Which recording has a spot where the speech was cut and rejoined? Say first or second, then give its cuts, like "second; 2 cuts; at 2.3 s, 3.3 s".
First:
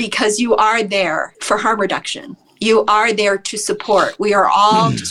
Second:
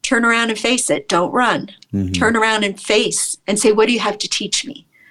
first; 1 cut; at 1.4 s